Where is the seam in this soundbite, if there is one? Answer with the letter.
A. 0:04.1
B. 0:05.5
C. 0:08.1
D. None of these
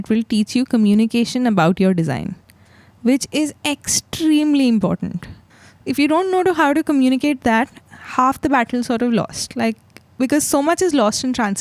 D